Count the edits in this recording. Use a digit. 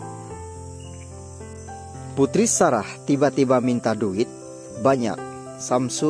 1